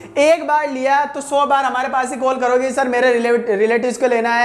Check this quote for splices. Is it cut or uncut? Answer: uncut